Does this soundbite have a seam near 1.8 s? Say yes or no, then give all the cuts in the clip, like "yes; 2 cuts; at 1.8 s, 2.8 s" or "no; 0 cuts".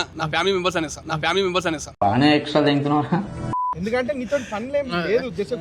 no; 1 cut; at 3.6 s